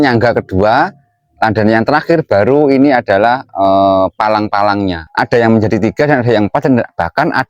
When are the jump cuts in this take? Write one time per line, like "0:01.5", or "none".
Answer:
0:05.0

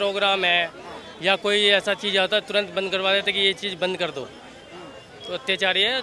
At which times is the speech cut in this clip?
none

